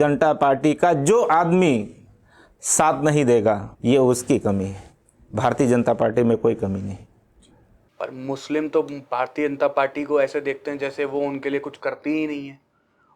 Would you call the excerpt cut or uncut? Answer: cut